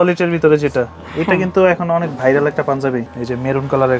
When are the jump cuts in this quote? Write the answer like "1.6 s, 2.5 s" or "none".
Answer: 3.1 s